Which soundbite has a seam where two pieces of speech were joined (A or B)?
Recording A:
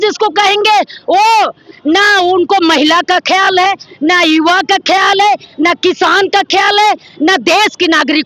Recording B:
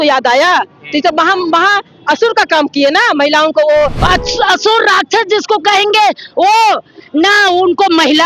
B